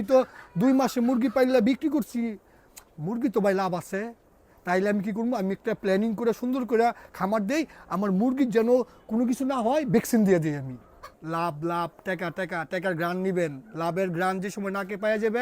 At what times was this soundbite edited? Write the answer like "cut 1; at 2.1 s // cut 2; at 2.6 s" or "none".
cut 1; at 11.2 s